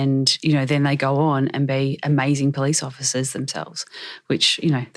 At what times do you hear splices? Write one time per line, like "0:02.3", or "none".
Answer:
none